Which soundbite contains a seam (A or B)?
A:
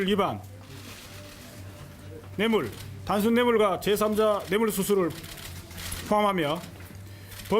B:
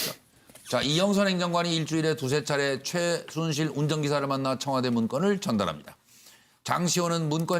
A